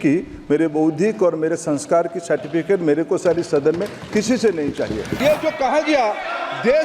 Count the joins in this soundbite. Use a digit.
1